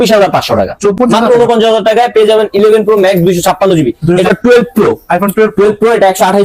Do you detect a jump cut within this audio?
yes; 2 cuts; at 1.0 s, 4.3 s

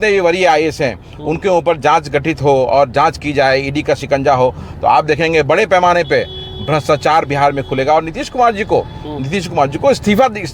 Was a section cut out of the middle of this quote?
no; 0 cuts

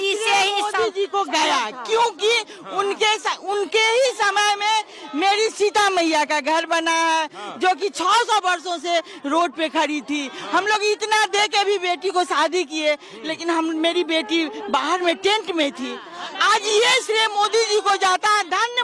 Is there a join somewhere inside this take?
no; 0 cuts

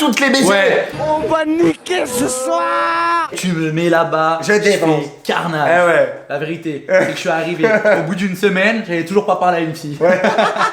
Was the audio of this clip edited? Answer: no; 0 cuts

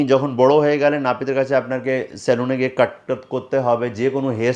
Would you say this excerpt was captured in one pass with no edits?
yes; 0 cuts

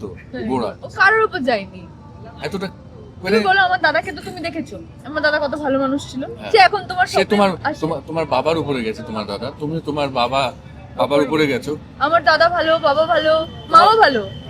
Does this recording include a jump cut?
no; 0 cuts

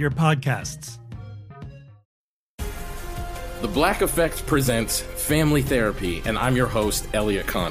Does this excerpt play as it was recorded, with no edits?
no; 1 cut; at 2.0 s

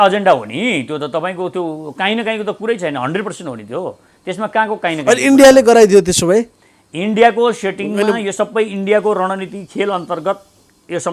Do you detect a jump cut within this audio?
no; 0 cuts

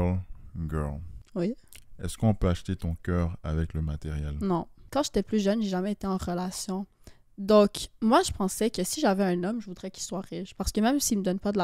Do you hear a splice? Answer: yes; 2 cuts; at 1.1 s, 4.8 s

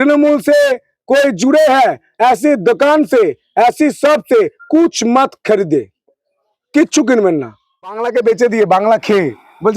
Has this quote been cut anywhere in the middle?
yes; 1 cut; at 8.1 s

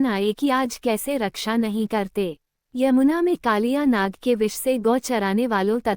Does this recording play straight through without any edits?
no; 2 cuts; at 1.2 s, 2.5 s

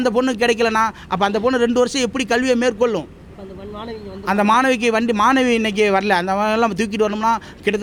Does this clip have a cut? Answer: no; 0 cuts

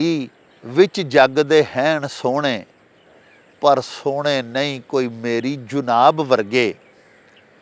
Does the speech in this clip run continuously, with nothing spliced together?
yes; 0 cuts

